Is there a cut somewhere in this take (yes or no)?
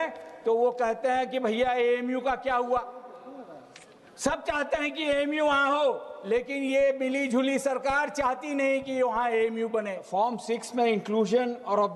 yes